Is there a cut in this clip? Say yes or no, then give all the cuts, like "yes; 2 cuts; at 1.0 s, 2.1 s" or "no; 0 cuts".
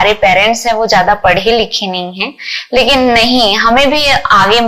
no; 0 cuts